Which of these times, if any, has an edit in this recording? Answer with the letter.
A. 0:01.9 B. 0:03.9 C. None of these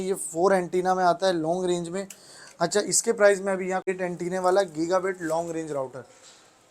B